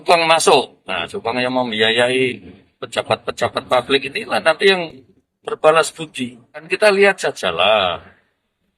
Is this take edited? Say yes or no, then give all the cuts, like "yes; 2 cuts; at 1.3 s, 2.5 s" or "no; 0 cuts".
yes; 1 cut; at 6.7 s